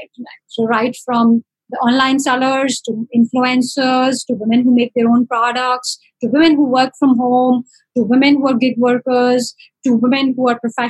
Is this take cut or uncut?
uncut